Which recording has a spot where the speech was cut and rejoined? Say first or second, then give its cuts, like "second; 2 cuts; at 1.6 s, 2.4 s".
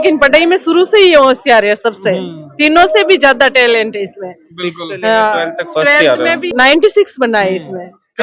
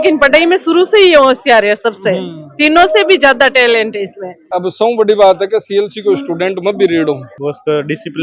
second; 2 cuts; at 4.5 s, 7.3 s